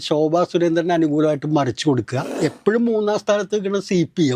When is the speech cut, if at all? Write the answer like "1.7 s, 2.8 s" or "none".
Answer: 2.3 s